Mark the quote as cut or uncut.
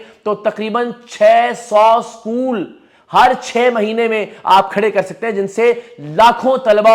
uncut